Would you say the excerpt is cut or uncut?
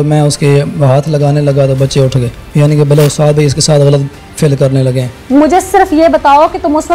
cut